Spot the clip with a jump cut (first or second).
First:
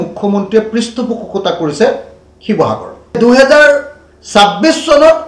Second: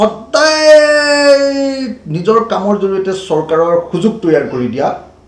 first